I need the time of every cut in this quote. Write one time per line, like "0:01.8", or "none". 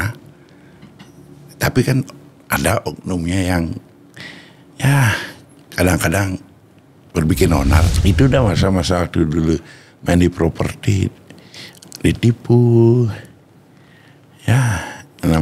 0:07.9